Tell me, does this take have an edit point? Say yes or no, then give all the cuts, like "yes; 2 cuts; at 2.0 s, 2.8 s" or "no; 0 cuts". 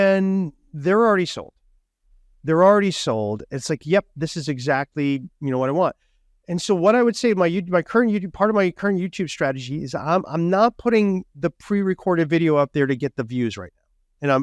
no; 0 cuts